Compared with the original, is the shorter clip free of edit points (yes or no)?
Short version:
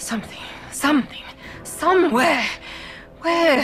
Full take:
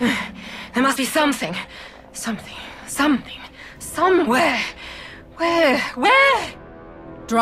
yes